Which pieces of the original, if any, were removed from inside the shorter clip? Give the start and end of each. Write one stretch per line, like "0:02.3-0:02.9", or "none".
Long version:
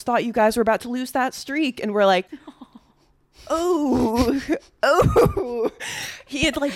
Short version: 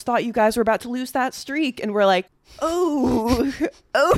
0:02.4-0:03.3